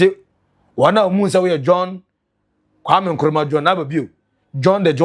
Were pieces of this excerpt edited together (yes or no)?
no